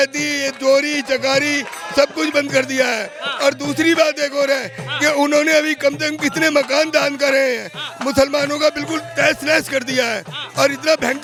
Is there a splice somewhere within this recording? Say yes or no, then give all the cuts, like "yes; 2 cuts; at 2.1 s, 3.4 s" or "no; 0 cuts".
no; 0 cuts